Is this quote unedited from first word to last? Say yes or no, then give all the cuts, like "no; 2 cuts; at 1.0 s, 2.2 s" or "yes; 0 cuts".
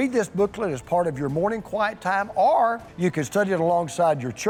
yes; 0 cuts